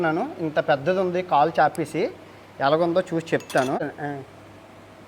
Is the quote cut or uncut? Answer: cut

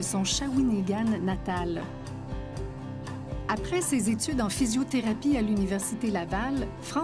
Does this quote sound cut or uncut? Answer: uncut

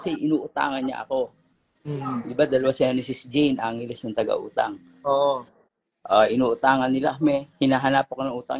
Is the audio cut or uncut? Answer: cut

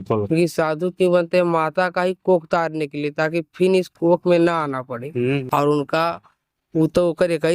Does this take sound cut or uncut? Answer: cut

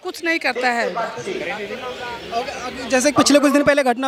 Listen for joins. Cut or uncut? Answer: uncut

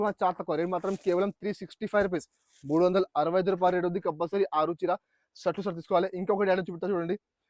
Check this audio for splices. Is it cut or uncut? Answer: uncut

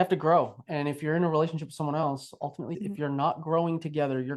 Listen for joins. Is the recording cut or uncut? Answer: cut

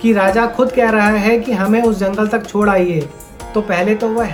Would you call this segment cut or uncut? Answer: uncut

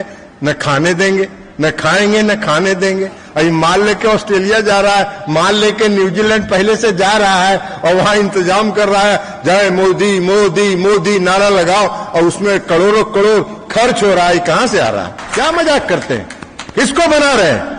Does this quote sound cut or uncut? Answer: cut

